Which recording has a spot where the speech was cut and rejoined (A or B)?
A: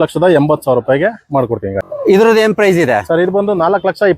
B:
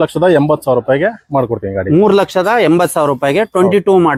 A